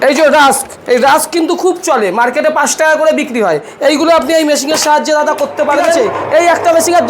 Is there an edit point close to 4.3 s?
no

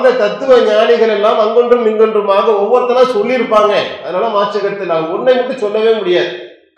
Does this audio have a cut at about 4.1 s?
no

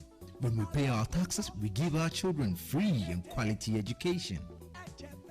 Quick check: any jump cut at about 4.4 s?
no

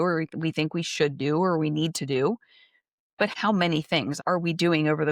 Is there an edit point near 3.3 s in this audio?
yes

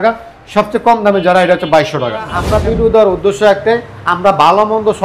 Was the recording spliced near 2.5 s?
yes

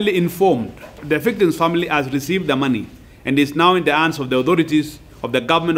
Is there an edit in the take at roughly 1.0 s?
yes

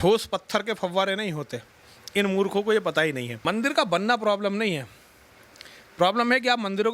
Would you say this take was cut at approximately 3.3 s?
yes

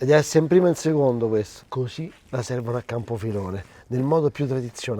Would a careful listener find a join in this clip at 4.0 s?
no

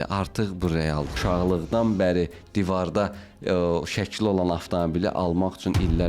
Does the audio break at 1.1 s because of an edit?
yes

